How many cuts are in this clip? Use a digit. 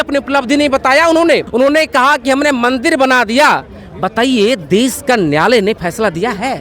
1